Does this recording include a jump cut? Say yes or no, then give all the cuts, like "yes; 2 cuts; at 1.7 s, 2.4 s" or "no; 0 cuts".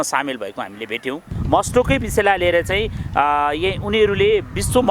yes; 1 cut; at 1.3 s